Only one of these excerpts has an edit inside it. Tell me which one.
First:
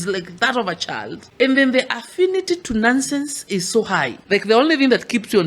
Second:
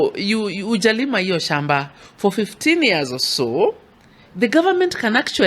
first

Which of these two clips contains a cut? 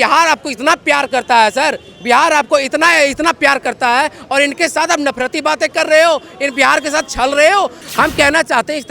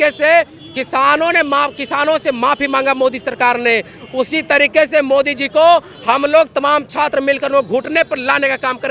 first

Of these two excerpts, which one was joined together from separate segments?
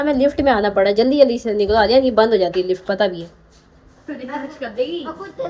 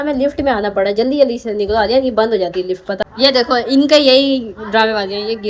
second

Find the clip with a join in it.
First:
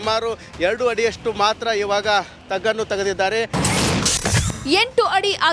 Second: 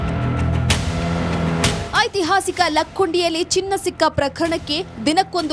second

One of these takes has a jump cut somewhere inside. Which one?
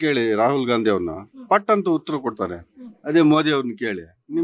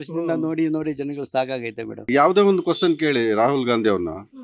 second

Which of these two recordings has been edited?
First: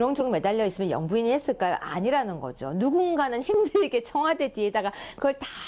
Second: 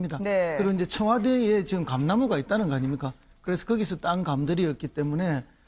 first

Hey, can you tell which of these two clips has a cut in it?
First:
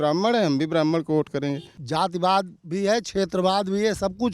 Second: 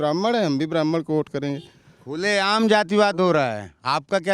first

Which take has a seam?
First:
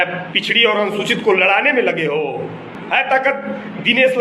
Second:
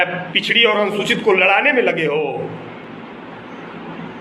first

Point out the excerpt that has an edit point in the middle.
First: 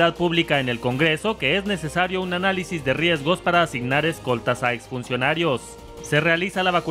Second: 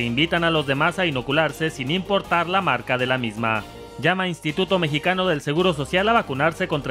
first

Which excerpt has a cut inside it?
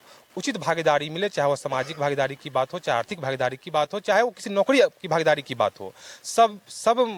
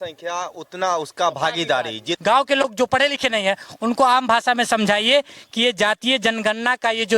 second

